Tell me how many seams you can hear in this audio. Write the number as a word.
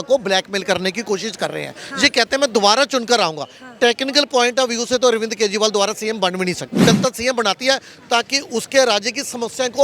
one